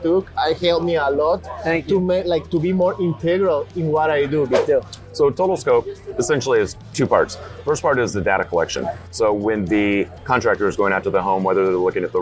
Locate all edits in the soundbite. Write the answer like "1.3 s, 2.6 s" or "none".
4.6 s